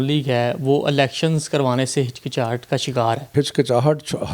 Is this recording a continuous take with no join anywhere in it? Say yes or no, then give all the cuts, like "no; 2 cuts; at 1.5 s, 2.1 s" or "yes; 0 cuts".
no; 1 cut; at 3.3 s